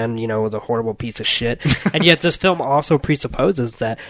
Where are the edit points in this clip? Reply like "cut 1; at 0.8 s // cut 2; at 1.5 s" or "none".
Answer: none